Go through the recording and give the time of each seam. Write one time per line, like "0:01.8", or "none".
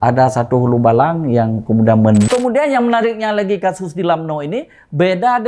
0:02.3